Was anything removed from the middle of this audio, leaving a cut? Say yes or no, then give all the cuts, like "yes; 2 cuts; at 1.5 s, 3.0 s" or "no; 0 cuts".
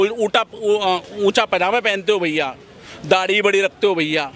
no; 0 cuts